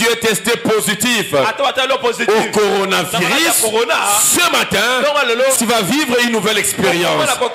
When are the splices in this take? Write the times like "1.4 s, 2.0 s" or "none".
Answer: none